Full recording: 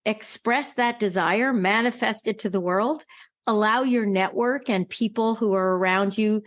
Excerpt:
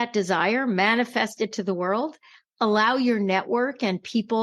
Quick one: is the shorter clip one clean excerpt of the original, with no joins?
yes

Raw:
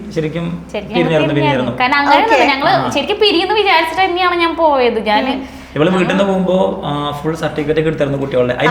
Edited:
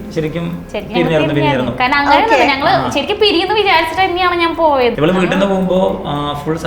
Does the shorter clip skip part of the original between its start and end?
yes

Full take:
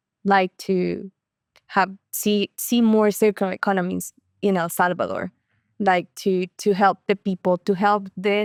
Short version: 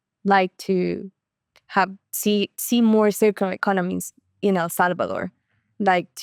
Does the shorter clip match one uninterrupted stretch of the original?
yes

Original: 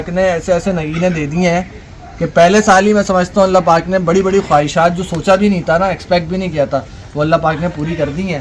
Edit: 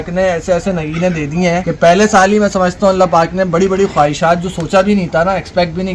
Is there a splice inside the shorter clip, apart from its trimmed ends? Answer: yes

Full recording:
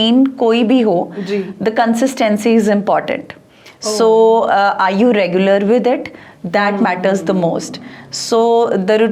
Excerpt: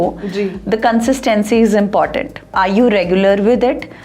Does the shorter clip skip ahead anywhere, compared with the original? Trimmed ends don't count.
yes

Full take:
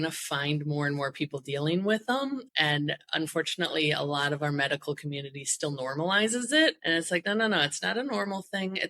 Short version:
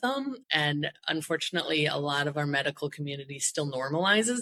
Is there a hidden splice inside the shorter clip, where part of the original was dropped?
no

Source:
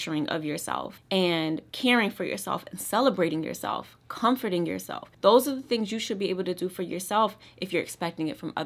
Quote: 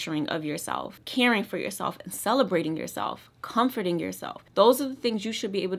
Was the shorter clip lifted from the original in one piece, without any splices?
no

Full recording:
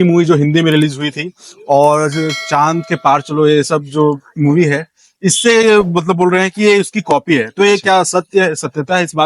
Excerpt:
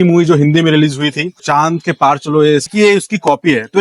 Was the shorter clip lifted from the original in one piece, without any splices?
no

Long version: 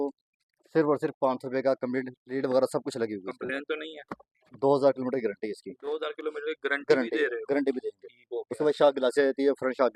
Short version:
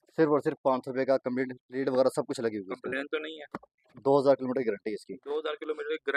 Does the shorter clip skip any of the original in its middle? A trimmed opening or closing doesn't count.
no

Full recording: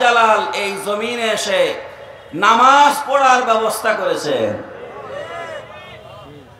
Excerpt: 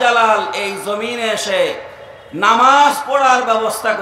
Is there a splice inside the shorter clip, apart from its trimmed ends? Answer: no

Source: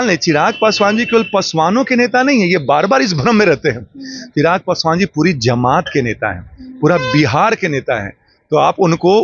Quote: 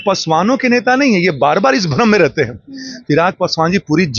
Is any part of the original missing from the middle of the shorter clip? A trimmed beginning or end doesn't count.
no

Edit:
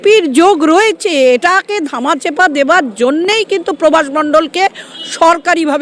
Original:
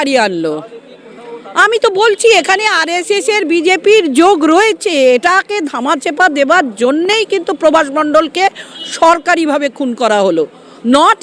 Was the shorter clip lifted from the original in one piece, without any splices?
yes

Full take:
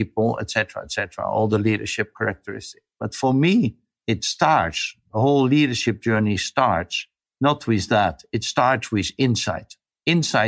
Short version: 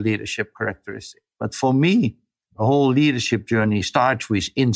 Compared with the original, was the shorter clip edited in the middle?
yes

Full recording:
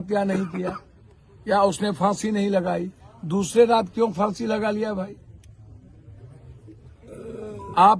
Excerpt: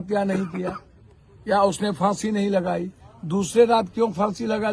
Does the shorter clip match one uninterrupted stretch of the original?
yes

